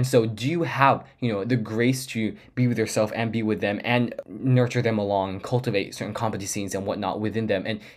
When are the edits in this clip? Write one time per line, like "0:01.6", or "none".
0:04.2